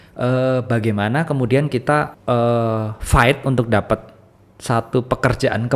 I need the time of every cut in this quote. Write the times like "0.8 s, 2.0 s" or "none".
2.1 s